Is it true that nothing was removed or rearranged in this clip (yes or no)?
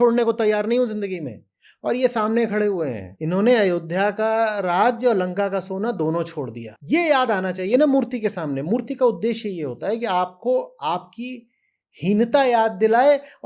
no